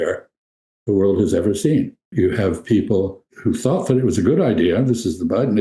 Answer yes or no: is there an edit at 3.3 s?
yes